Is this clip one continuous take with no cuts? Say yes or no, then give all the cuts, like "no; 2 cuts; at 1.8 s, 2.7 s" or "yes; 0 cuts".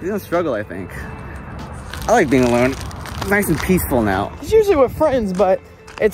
yes; 0 cuts